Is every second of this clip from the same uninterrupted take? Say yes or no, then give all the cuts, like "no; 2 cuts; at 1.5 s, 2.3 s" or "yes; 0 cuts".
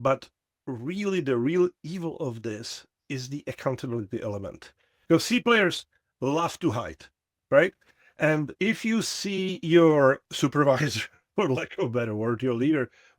no; 2 cuts; at 5.0 s, 10.2 s